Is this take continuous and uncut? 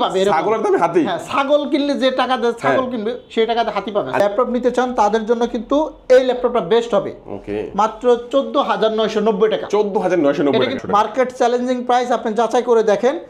no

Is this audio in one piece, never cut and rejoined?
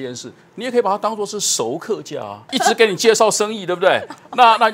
no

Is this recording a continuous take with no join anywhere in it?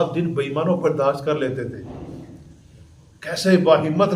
yes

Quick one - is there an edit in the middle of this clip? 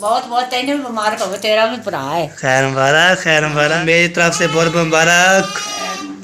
yes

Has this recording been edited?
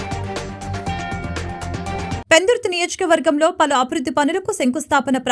yes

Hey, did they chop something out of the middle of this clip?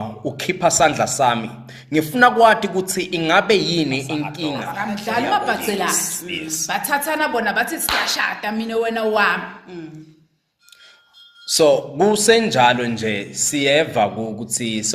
yes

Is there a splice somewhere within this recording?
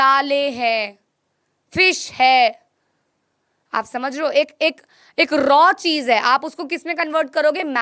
no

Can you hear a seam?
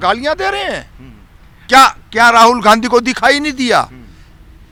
no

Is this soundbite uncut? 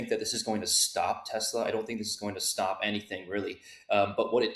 yes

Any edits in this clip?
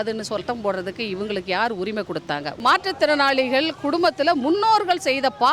yes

